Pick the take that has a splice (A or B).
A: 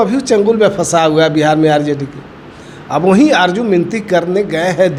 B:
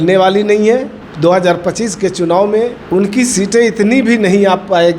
B